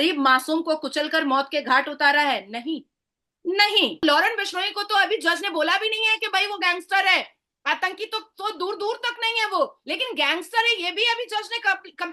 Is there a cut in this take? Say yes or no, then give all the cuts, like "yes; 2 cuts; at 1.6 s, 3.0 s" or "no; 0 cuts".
yes; 1 cut; at 4.0 s